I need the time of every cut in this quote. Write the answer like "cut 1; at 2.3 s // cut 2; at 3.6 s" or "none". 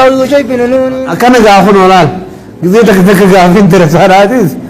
cut 1; at 1.1 s